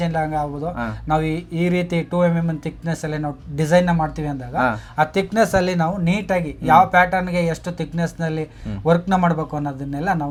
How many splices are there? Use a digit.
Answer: 0